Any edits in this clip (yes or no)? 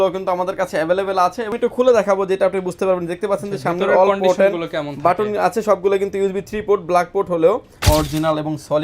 yes